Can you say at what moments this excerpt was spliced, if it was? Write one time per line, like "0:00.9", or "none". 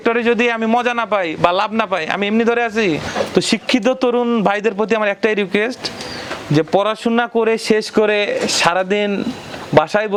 none